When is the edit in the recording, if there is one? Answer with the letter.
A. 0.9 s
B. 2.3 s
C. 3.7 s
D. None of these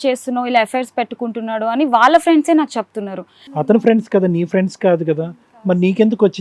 C